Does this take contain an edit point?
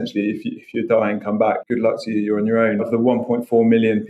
yes; 2 cuts; at 1.6 s, 2.9 s

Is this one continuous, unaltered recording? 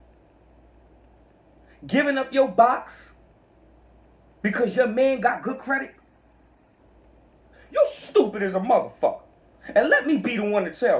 yes; 0 cuts

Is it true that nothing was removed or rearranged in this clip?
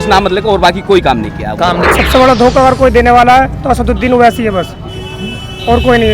no; 1 cut; at 1.8 s

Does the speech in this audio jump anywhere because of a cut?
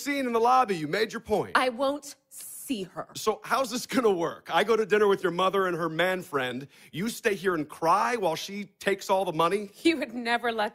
no; 0 cuts

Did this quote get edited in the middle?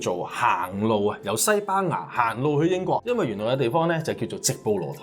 yes; 1 cut; at 3.0 s

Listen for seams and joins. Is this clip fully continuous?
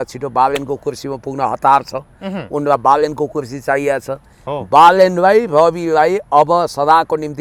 yes; 0 cuts

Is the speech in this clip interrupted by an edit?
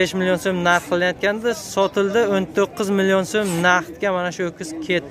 no; 0 cuts

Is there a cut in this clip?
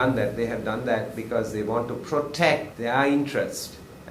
yes; 1 cut; at 2.7 s

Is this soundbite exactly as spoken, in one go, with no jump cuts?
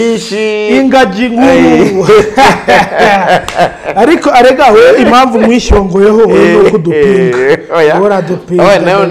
yes; 0 cuts

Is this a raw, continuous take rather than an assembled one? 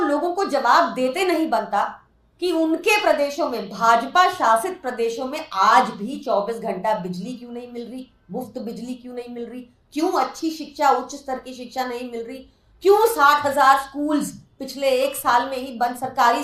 yes; 0 cuts

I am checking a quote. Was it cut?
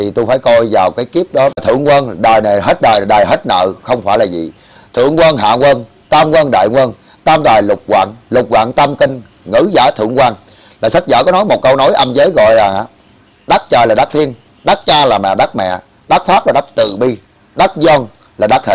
yes; 1 cut; at 1.6 s

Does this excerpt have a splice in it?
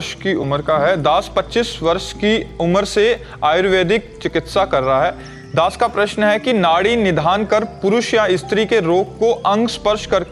no; 0 cuts

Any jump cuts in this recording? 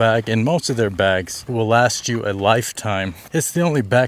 yes; 2 cuts; at 1.4 s, 3.2 s

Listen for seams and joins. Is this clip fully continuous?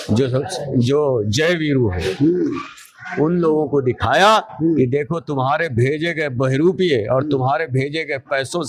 yes; 0 cuts

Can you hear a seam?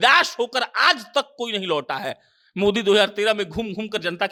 no; 0 cuts

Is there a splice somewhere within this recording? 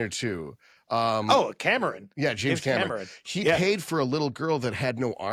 no; 0 cuts

